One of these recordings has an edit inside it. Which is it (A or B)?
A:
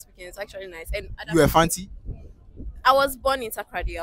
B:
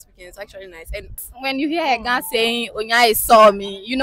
B